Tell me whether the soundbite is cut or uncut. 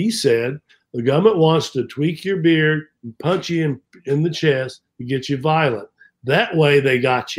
uncut